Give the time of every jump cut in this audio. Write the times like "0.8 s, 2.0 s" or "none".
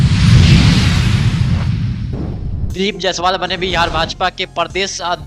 2.7 s